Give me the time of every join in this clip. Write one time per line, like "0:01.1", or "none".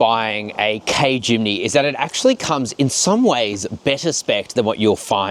none